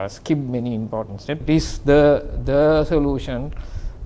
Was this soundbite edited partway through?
yes; 1 cut; at 1.4 s

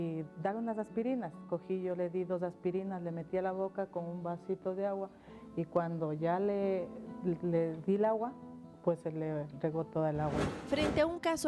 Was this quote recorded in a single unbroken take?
no; 1 cut; at 10.5 s

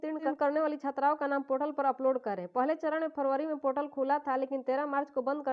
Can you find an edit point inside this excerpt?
no; 0 cuts

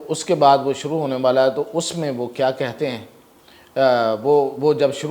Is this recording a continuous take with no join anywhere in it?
yes; 0 cuts

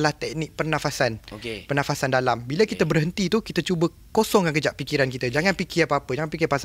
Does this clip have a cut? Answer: no; 0 cuts

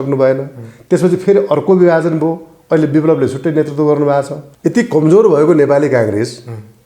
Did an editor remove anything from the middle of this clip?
yes; 1 cut; at 4.4 s

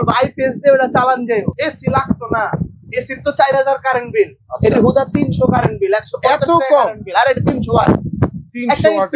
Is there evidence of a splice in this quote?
yes; 1 cut; at 1.5 s

